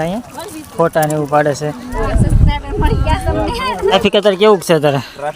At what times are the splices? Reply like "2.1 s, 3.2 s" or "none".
2.0 s, 3.9 s

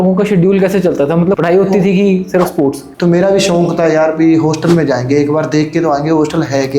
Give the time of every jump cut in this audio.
1.4 s, 2.8 s

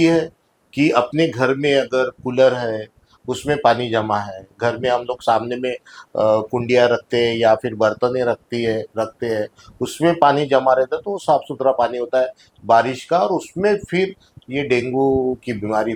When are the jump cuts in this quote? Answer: none

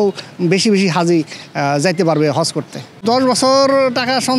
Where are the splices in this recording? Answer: 2.9 s

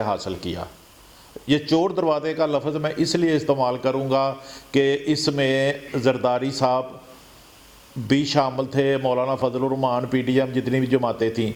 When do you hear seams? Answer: none

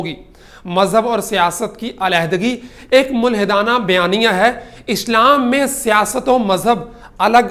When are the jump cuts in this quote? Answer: none

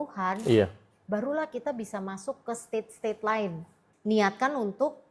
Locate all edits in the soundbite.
3.8 s

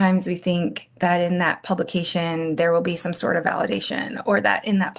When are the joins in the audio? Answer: none

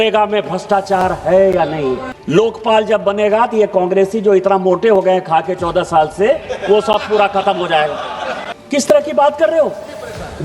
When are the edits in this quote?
2.1 s, 8.5 s

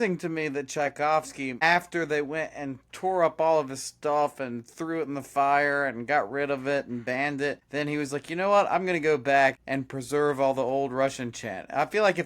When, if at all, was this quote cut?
1.6 s, 7.6 s, 9.7 s

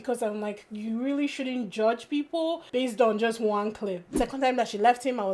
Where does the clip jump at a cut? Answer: 4.0 s

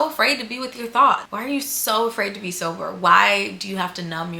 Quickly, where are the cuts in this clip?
1.3 s

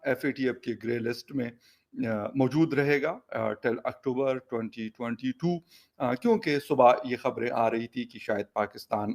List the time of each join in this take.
none

